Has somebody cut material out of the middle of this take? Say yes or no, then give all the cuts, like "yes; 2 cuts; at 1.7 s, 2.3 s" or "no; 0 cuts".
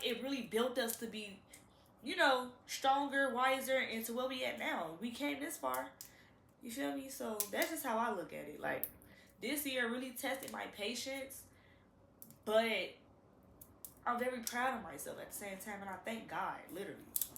no; 0 cuts